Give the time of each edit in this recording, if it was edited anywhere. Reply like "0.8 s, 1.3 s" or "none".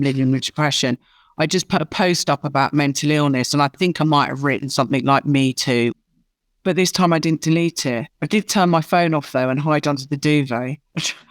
5.9 s

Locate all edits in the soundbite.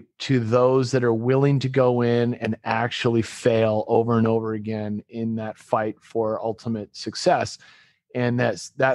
none

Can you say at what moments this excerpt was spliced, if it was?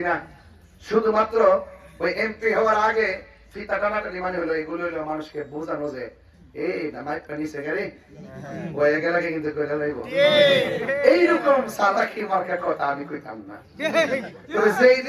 none

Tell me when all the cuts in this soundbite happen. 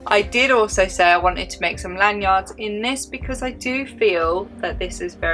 none

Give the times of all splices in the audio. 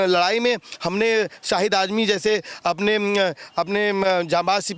none

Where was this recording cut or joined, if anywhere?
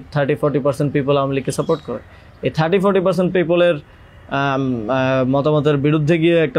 none

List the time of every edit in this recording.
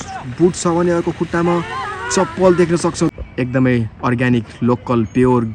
none

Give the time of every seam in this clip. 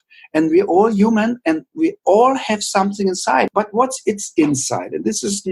3.5 s

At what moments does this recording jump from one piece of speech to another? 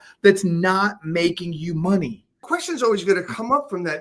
2.3 s

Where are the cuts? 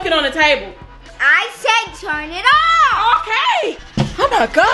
3.8 s

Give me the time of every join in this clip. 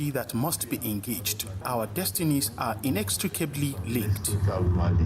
1.6 s

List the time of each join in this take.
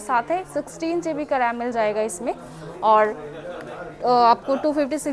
none

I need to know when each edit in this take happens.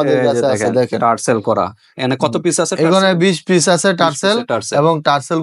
none

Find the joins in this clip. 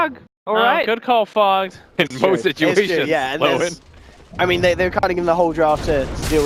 none

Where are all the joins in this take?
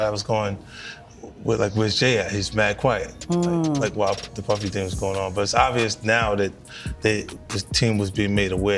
none

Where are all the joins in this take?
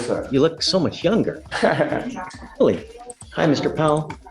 none

